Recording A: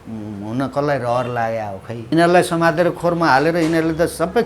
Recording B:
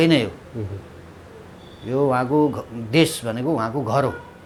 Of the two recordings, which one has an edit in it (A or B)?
A